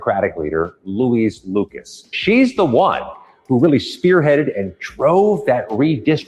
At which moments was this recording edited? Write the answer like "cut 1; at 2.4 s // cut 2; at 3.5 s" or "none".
cut 1; at 2.2 s